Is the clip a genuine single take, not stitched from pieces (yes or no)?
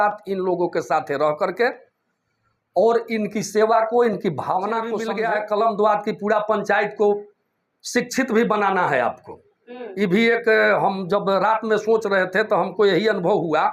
no